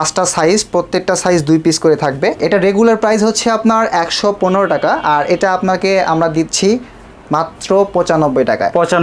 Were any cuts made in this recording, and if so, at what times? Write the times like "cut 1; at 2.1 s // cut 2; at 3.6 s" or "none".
cut 1; at 2.4 s